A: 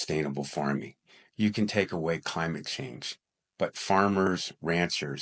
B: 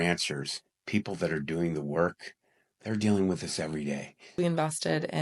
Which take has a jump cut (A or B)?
B